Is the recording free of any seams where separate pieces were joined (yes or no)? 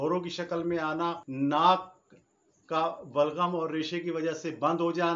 no